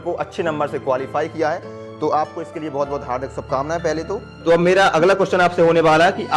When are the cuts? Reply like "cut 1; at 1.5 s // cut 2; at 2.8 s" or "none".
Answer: none